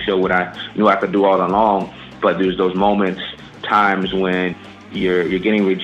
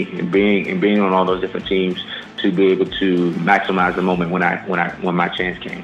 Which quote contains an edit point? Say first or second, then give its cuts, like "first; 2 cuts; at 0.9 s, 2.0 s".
first; 3 cuts; at 2.1 s, 3.6 s, 4.8 s